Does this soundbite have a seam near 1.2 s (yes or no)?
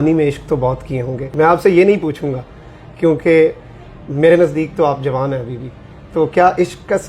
yes